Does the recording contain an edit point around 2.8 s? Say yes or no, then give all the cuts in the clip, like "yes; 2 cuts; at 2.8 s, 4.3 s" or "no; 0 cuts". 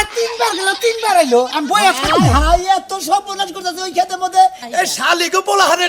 no; 1 cut; at 4.6 s